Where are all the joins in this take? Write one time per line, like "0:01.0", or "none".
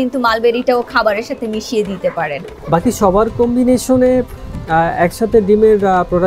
0:02.5